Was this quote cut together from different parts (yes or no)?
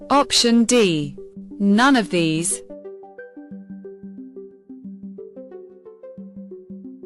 yes